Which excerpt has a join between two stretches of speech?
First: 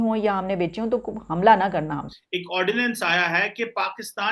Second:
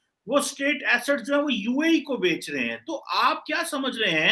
first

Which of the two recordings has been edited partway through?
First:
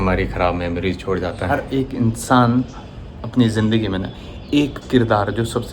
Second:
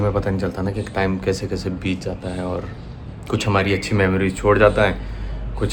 first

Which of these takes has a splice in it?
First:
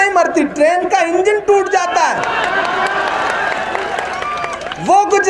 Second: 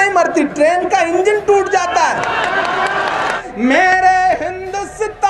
second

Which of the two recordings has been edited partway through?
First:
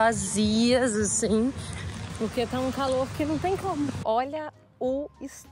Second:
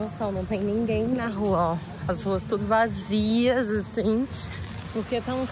first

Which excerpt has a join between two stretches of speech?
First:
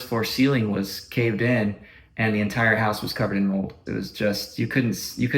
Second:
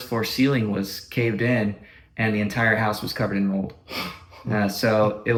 first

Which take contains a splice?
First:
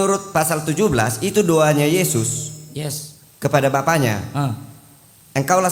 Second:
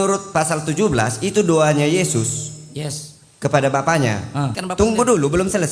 second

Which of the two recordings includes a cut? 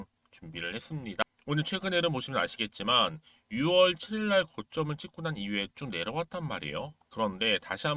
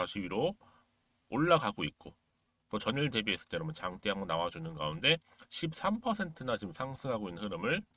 first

